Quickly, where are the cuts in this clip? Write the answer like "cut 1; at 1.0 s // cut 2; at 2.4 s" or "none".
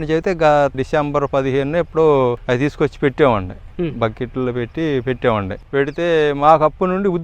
cut 1; at 0.8 s // cut 2; at 2.4 s // cut 3; at 5.6 s